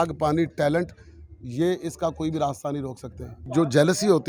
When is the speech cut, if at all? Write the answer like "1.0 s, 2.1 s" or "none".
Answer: 3.4 s